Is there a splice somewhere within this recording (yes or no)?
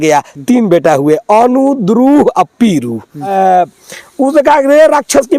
yes